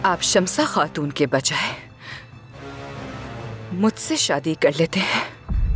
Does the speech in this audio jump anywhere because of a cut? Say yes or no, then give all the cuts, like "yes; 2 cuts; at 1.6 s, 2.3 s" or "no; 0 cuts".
no; 0 cuts